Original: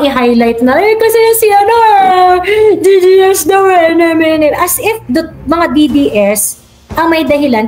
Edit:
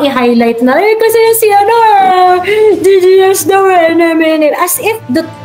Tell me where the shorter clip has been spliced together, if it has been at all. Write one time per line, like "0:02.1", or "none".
none